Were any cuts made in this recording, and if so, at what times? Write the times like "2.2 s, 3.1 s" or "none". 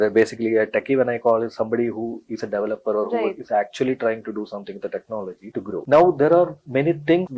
5.8 s

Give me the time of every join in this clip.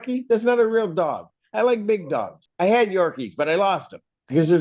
2.4 s

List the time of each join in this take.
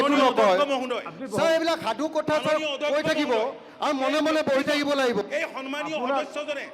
none

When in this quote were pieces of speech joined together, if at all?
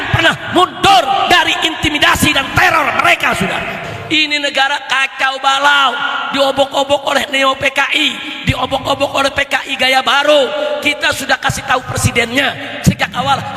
3.9 s

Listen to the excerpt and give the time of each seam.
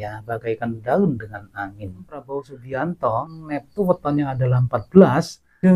2.2 s, 3.3 s

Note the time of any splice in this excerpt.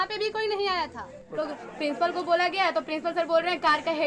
1.3 s

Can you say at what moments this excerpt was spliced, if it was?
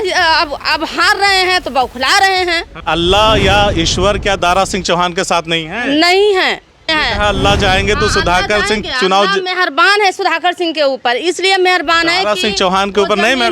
2.8 s, 6.9 s

